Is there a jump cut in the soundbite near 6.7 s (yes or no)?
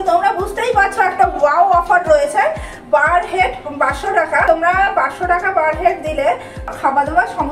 yes